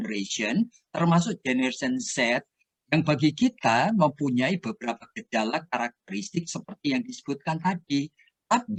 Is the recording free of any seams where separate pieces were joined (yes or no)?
yes